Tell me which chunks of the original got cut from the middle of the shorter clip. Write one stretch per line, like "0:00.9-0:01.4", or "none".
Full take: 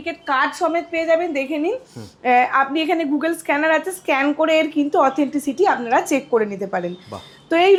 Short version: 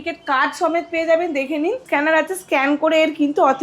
0:01.8-0:03.4